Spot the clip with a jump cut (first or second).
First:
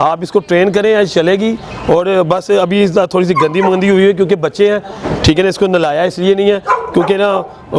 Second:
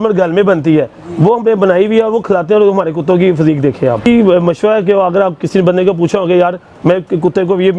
second